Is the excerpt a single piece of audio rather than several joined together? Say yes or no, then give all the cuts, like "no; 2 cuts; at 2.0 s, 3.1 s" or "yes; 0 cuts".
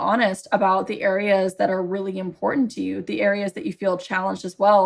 yes; 0 cuts